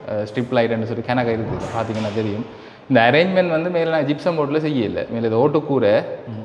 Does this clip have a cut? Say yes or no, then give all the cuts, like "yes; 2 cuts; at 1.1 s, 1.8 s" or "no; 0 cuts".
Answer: no; 0 cuts